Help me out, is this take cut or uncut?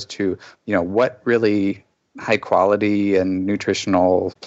uncut